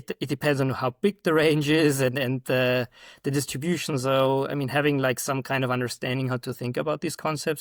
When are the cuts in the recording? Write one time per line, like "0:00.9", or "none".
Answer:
none